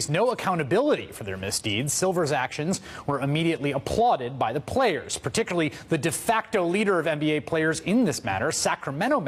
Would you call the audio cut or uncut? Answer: uncut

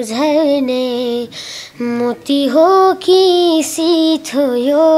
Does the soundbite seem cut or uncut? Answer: uncut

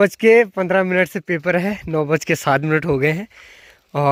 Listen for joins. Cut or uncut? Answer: uncut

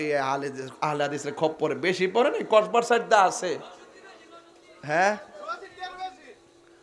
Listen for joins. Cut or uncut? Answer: uncut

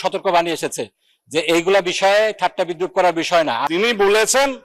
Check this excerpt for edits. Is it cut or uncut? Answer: cut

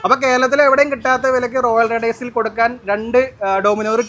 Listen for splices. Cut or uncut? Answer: uncut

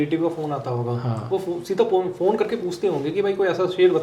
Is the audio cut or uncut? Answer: uncut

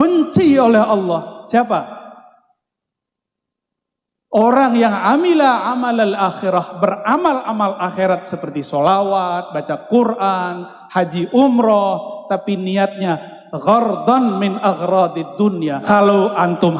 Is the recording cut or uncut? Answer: cut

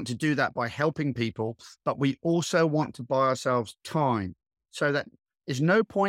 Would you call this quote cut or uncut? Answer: uncut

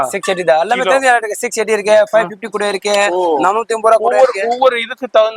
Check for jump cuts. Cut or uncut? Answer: uncut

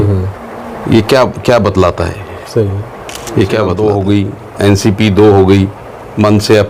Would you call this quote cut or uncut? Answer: cut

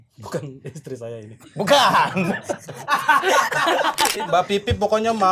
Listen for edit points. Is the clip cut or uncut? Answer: cut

